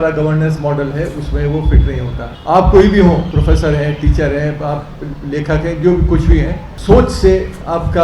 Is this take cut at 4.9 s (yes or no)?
no